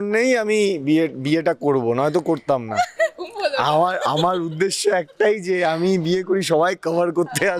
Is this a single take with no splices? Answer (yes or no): yes